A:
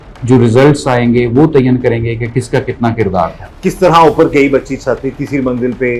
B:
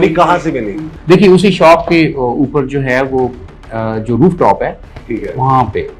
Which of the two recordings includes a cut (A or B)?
A